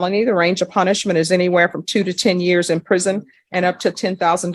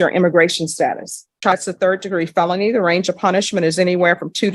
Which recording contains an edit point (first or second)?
second